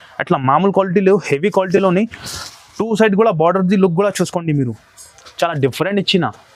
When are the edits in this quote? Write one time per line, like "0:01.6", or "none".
none